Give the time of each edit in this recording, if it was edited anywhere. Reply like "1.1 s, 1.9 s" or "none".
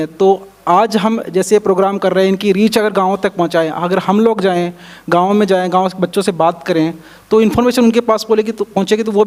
none